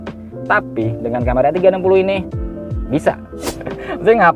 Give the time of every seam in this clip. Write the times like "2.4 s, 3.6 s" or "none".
3.4 s